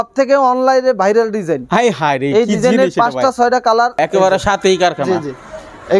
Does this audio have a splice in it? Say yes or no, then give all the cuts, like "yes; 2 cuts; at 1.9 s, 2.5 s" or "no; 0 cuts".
yes; 1 cut; at 4.0 s